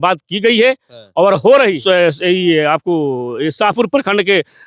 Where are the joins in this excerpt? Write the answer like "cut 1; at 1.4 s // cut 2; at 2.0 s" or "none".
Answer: cut 1; at 1.8 s